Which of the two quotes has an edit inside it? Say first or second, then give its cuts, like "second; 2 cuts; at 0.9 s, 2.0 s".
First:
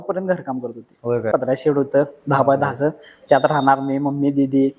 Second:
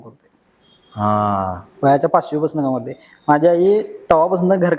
first; 1 cut; at 1.3 s